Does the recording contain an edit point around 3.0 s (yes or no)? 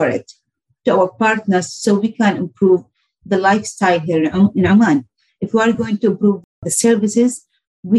no